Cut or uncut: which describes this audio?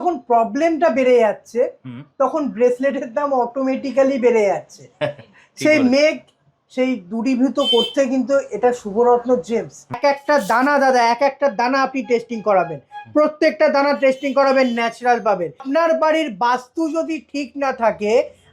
cut